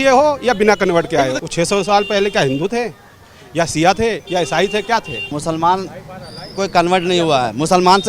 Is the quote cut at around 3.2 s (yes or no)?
no